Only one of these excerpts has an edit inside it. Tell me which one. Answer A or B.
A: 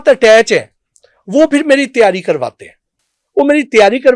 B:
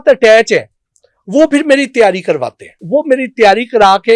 B